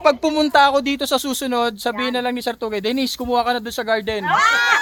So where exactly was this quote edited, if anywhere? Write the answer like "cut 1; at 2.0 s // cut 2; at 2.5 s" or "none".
none